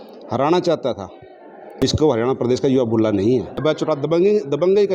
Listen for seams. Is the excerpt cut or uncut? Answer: cut